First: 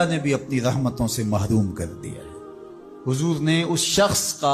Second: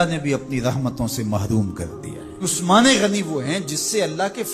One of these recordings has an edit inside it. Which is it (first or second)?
second